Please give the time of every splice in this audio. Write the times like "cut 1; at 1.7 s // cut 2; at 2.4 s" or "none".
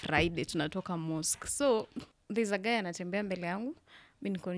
cut 1; at 2.1 s